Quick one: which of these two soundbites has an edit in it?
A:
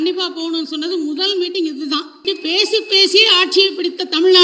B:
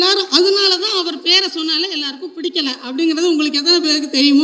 A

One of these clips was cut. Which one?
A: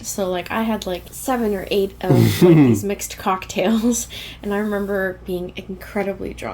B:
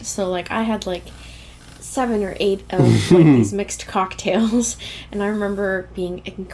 A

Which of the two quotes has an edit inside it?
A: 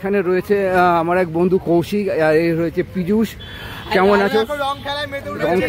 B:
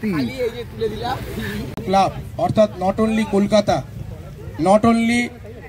B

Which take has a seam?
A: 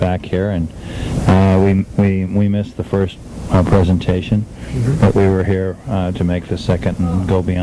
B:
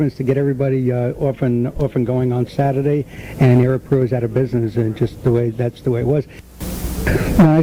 A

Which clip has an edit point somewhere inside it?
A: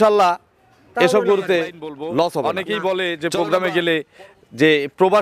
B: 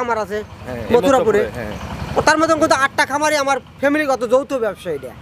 A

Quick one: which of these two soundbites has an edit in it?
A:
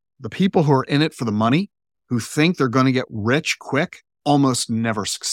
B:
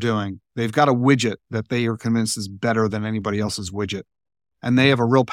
A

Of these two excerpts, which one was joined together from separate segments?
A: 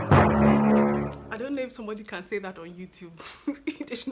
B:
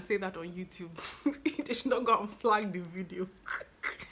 A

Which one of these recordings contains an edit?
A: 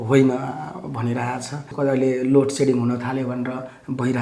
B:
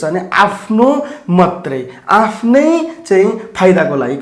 A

